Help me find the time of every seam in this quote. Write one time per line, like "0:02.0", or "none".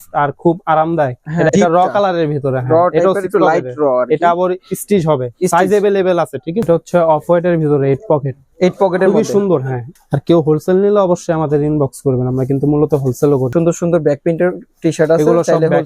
0:01.5
0:06.6
0:09.8
0:13.5